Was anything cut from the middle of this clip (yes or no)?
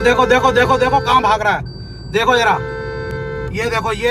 no